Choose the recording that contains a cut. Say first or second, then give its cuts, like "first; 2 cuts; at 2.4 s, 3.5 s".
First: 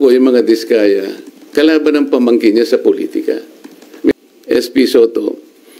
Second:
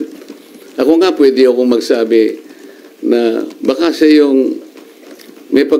first; 1 cut; at 4.1 s